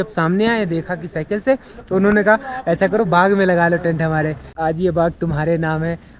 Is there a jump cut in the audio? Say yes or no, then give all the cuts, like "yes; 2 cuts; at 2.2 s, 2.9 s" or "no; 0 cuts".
yes; 1 cut; at 4.5 s